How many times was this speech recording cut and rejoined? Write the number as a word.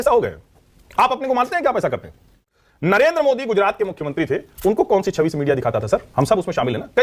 two